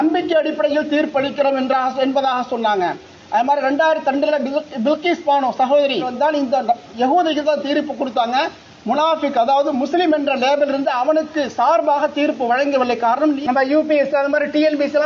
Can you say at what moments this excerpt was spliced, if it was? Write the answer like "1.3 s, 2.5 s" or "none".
6.1 s, 13.4 s